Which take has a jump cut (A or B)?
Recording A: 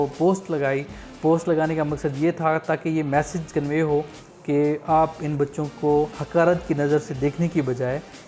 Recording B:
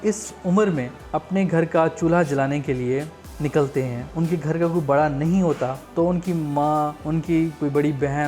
B